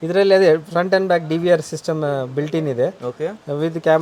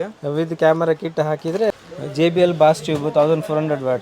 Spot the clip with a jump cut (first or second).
second